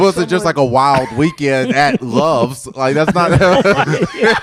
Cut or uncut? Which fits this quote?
uncut